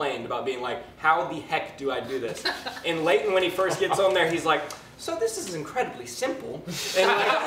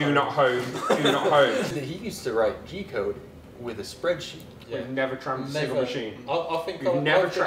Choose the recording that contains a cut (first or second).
second